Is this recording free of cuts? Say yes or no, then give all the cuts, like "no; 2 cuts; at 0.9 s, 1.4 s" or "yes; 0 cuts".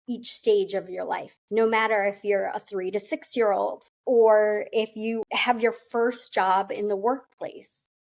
no; 2 cuts; at 3.9 s, 5.2 s